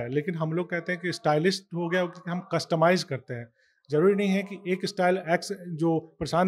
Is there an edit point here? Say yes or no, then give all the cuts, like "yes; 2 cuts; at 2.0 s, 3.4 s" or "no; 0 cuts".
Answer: no; 0 cuts